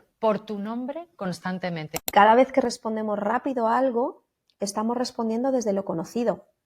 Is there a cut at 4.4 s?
no; 1 cut; at 2.1 s

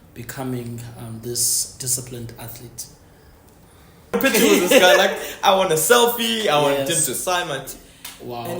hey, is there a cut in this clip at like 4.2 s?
yes; 1 cut; at 4.2 s

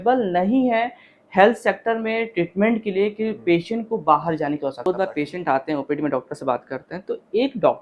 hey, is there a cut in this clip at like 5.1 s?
yes; 1 cut; at 5.1 s

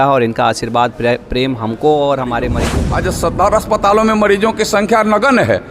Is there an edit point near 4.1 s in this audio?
no; 1 cut; at 2.7 s

